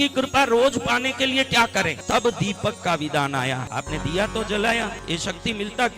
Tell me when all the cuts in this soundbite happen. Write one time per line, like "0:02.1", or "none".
0:02.0
0:03.6
0:05.0